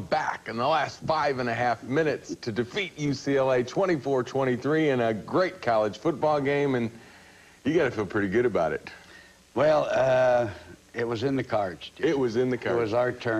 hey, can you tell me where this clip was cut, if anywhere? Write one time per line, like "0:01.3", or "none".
0:08.9